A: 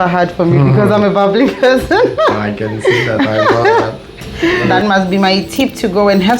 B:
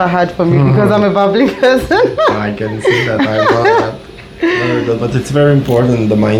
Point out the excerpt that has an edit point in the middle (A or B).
A